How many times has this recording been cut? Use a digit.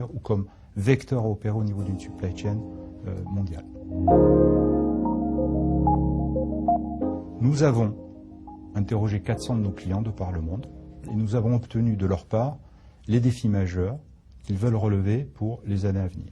2